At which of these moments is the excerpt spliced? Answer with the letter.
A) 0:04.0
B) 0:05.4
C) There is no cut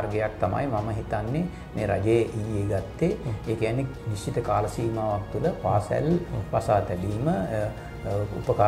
A